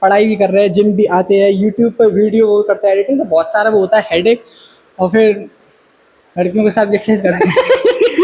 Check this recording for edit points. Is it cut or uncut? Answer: uncut